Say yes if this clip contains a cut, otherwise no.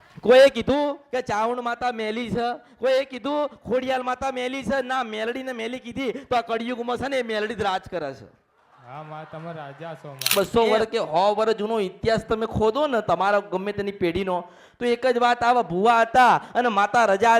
yes